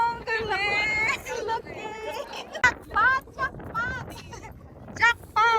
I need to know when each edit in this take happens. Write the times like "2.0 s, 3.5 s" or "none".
2.6 s

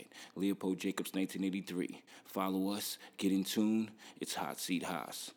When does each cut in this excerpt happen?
none

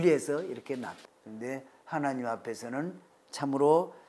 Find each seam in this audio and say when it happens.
1.0 s

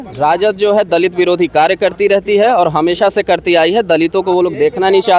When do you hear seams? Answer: none

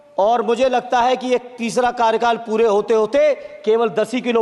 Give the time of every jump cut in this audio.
none

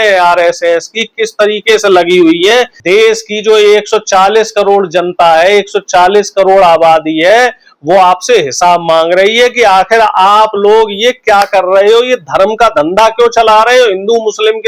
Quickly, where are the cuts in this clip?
2.8 s

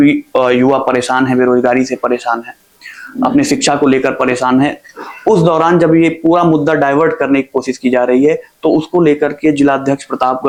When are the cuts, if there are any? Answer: none

